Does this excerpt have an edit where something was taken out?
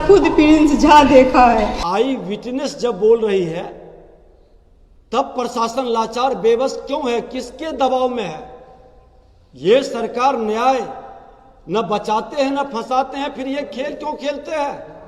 yes; 1 cut; at 1.8 s

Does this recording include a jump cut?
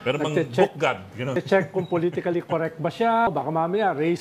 yes; 2 cuts; at 1.4 s, 3.3 s

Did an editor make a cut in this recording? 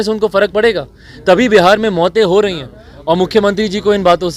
no; 0 cuts

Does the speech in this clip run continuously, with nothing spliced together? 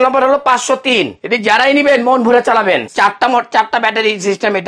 no; 2 cuts; at 1.2 s, 2.9 s

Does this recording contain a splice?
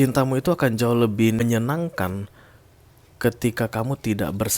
yes; 1 cut; at 1.4 s

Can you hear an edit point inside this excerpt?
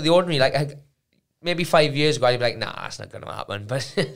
no; 0 cuts

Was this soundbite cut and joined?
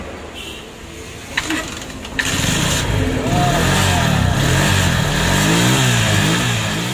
no; 0 cuts

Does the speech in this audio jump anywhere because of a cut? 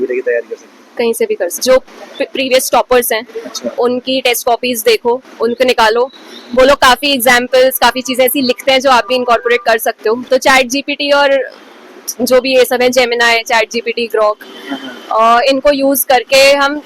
yes; 2 cuts; at 1.6 s, 10.2 s

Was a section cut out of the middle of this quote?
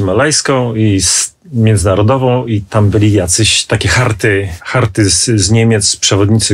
yes; 1 cut; at 4.6 s

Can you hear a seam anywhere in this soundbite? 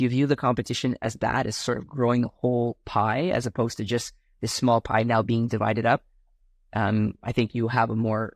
no; 0 cuts

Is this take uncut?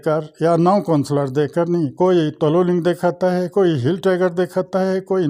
yes; 0 cuts

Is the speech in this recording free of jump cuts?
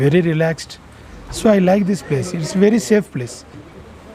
yes; 0 cuts

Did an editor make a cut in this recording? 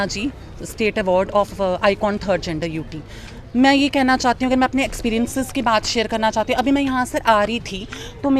no; 0 cuts

